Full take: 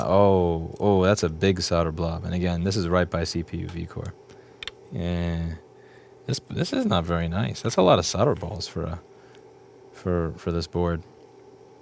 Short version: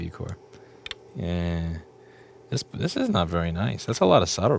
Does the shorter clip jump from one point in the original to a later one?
no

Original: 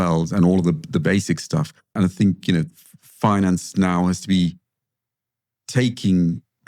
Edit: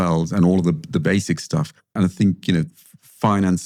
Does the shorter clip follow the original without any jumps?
yes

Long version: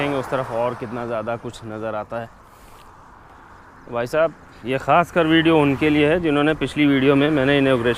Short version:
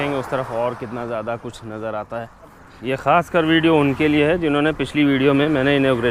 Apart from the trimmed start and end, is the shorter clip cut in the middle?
yes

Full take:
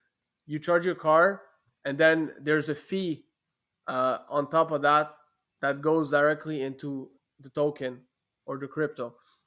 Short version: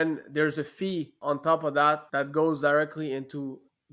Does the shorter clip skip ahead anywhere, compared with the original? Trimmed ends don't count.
yes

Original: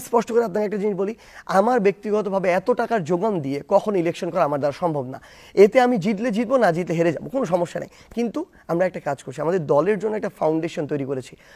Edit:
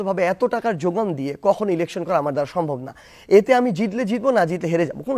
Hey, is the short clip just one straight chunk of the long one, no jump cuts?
yes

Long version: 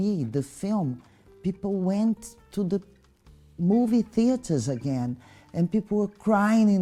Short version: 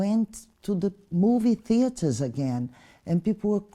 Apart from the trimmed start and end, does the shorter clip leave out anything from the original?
yes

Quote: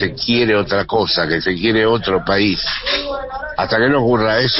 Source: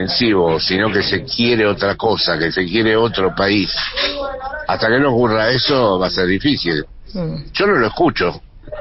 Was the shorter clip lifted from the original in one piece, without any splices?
yes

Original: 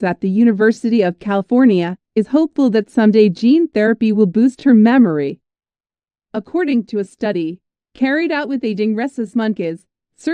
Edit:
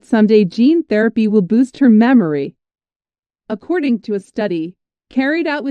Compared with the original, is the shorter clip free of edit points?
yes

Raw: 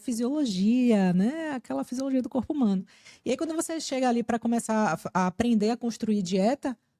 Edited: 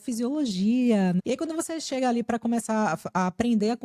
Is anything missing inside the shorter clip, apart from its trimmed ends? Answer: yes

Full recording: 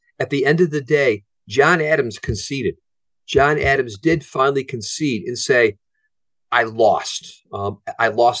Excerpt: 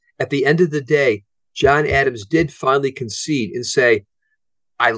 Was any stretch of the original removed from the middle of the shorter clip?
yes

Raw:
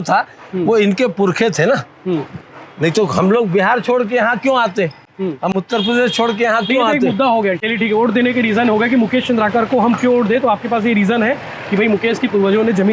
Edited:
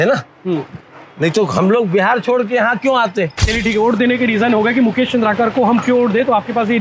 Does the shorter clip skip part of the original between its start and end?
yes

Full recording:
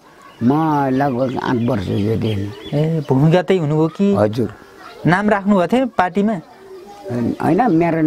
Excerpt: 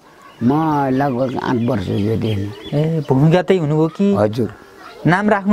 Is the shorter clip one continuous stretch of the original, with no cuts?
yes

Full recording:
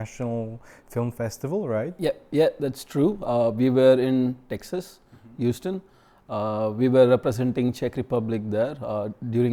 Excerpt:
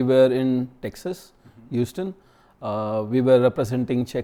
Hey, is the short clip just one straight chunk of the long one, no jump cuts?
yes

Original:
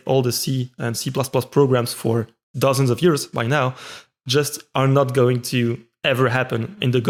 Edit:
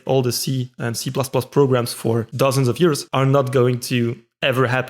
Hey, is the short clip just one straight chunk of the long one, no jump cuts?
no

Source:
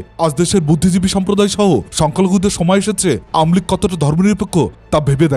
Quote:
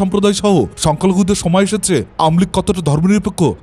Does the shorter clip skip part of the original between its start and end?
no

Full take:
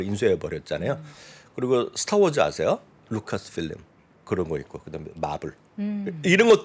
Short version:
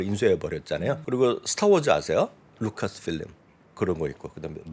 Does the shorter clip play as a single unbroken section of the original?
no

